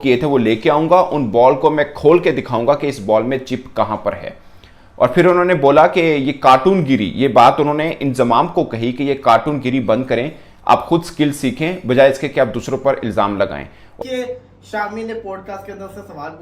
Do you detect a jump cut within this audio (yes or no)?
yes